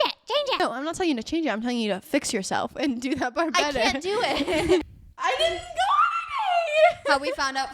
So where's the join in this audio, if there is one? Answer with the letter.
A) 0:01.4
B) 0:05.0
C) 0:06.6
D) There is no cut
B